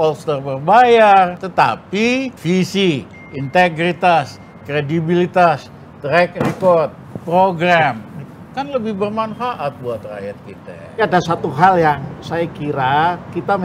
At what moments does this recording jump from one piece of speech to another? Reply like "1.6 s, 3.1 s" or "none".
1.4 s, 2.3 s, 11.0 s